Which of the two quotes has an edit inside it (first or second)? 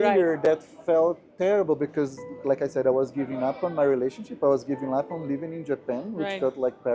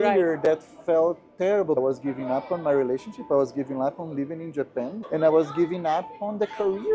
second